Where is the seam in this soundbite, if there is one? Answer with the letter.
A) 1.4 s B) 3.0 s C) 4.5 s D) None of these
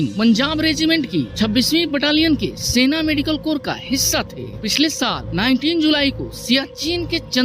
C